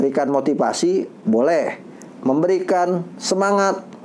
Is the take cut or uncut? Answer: uncut